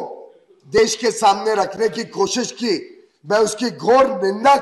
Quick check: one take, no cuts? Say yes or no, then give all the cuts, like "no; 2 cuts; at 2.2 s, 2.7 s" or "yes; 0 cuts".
yes; 0 cuts